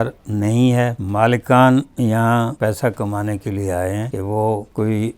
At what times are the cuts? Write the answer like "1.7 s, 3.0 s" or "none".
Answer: 1.0 s, 2.5 s, 4.3 s